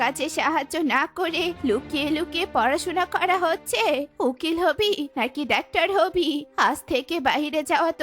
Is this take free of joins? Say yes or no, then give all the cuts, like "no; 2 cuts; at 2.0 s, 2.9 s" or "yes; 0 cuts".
yes; 0 cuts